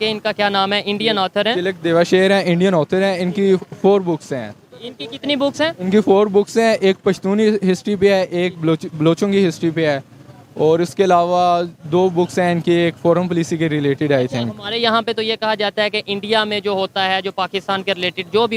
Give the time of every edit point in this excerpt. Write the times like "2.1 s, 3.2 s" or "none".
none